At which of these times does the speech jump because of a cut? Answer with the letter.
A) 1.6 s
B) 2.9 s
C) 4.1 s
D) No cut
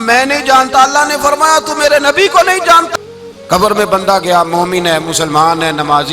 B